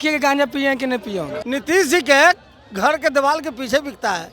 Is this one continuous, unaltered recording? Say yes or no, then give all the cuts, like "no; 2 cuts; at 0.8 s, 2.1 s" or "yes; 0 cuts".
no; 1 cut; at 1.4 s